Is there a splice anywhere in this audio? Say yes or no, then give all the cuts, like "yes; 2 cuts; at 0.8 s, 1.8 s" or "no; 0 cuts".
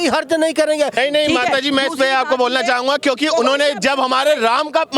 yes; 1 cut; at 1.0 s